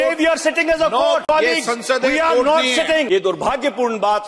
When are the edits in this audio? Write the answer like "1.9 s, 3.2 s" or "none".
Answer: 1.2 s, 3.1 s